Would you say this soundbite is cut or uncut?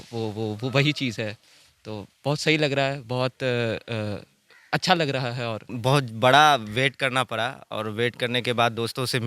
cut